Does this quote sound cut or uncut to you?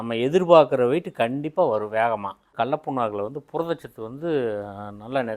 uncut